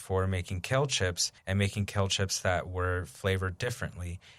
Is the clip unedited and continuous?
no; 1 cut; at 1.3 s

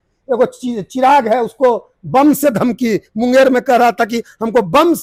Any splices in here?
no; 0 cuts

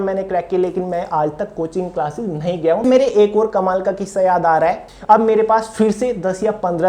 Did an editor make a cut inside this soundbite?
yes; 2 cuts; at 2.8 s, 4.8 s

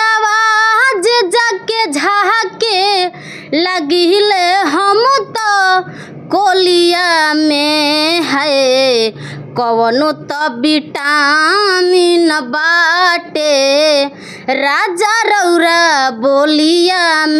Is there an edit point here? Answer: no; 0 cuts

